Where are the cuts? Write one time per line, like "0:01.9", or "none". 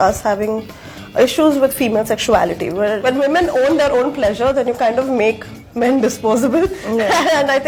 none

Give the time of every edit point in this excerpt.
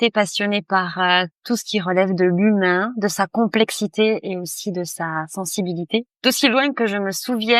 0:06.1

